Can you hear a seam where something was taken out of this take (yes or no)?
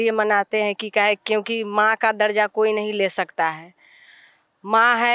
no